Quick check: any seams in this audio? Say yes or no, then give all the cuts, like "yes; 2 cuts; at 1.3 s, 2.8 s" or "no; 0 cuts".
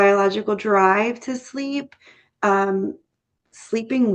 no; 0 cuts